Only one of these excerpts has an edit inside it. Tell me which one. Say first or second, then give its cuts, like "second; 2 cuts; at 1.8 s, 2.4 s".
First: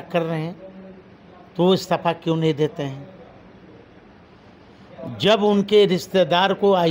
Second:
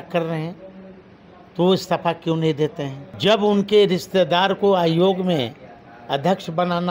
second; 1 cut; at 3.0 s